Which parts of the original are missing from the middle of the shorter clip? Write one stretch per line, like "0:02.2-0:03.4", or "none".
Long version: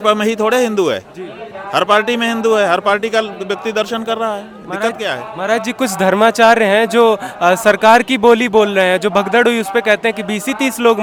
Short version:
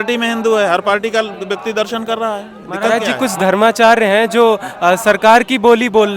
0:04.9-0:05.5